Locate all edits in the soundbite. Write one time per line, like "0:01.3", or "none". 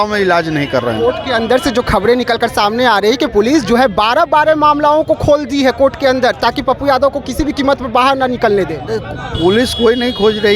none